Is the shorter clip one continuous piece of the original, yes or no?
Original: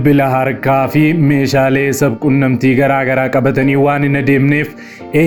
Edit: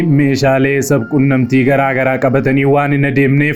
yes